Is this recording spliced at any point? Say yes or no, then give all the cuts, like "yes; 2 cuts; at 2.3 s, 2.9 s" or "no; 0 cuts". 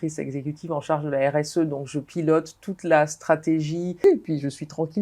yes; 1 cut; at 4.0 s